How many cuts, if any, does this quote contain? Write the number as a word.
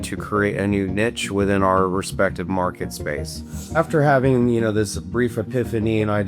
one